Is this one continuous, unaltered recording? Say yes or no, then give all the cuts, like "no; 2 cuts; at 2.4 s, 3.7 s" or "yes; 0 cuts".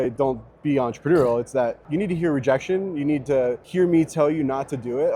no; 2 cuts; at 1.8 s, 3.6 s